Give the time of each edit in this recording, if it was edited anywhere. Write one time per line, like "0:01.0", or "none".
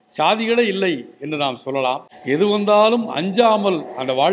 0:02.1